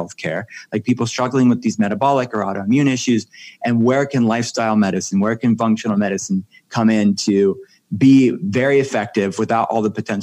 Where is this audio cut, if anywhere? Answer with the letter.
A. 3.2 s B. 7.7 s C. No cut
C